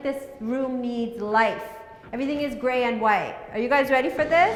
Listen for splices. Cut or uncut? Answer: uncut